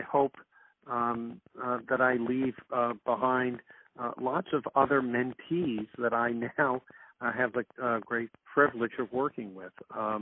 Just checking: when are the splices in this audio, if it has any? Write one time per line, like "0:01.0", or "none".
none